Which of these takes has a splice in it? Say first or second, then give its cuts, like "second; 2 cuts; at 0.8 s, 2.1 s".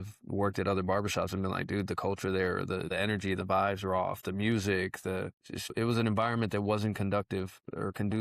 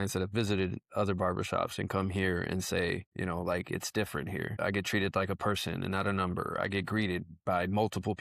first; 2 cuts; at 2.9 s, 5.7 s